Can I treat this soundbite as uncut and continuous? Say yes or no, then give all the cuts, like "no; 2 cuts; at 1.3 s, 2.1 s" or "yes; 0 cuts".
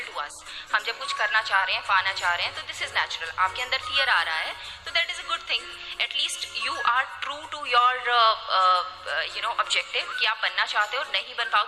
yes; 0 cuts